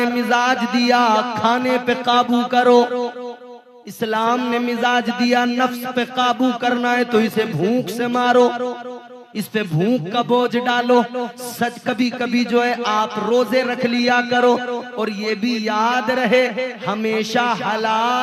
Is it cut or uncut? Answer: uncut